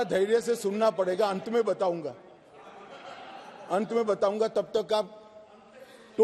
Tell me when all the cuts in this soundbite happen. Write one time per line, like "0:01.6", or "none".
none